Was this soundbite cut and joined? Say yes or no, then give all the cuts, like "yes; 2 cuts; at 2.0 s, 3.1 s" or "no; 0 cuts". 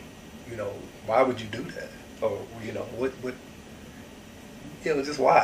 no; 0 cuts